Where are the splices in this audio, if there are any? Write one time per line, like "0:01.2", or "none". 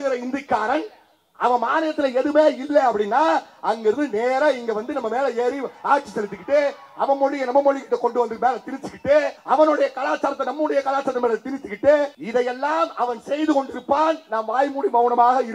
0:09.4
0:12.2